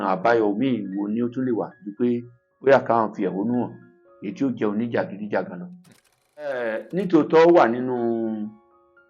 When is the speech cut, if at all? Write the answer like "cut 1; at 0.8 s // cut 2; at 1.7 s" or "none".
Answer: cut 1; at 6.4 s